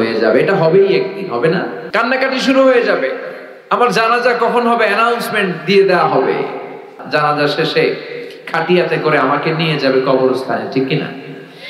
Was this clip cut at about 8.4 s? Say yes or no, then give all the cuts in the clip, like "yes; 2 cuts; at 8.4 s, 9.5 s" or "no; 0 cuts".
no; 2 cuts; at 1.8 s, 6.9 s